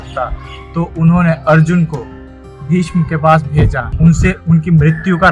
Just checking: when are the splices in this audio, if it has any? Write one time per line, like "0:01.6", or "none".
0:03.8